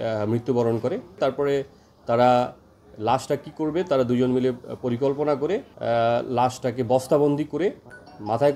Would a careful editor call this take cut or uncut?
cut